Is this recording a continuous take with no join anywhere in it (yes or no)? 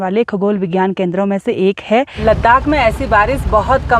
no